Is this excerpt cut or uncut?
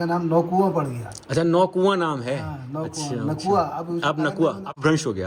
uncut